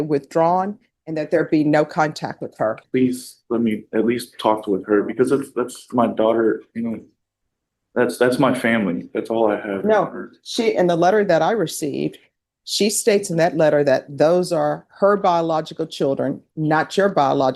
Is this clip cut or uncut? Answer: cut